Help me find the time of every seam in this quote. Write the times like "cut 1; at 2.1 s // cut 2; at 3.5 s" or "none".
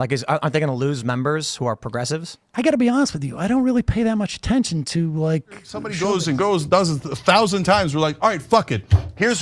cut 1; at 5.9 s